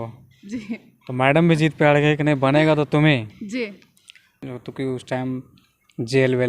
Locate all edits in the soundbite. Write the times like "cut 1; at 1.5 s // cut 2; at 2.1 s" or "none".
cut 1; at 4.5 s